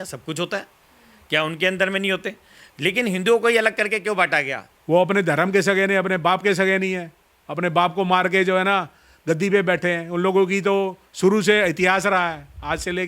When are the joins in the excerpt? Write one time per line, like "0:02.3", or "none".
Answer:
0:04.7

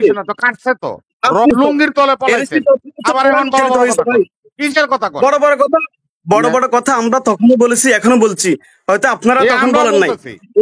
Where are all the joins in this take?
0:01.5

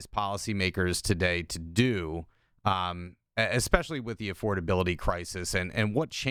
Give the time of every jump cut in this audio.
none

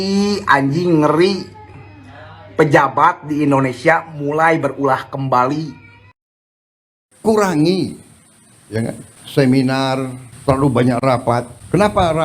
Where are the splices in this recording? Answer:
0:06.6

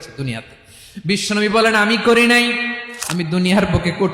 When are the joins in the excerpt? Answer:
0:02.8

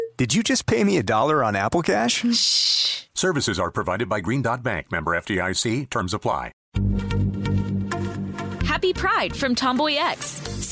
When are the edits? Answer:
0:06.6

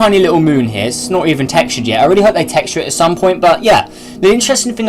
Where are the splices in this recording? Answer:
0:03.2

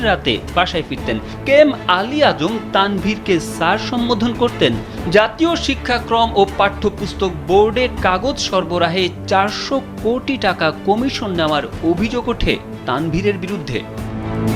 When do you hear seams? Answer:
none

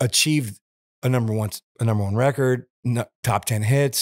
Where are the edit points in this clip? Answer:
0:02.7

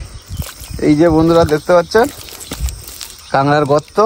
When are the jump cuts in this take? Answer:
none

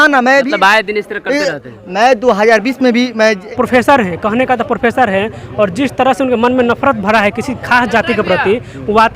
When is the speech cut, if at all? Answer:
0:03.5

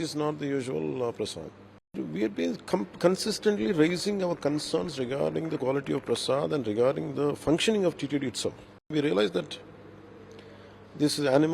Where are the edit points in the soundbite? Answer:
0:01.9
0:08.9

